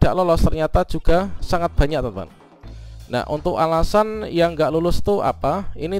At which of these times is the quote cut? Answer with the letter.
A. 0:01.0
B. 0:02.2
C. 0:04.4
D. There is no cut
D